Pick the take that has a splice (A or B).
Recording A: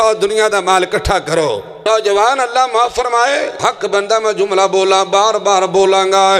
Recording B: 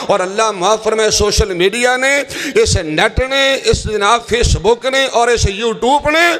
A